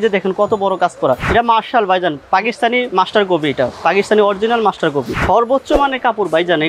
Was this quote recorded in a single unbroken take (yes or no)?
no